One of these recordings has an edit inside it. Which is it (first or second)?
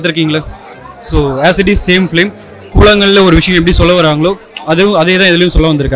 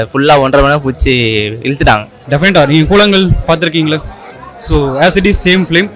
second